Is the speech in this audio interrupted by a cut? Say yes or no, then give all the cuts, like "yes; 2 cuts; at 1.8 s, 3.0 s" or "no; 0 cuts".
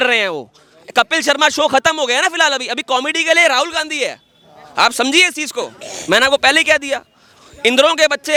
no; 0 cuts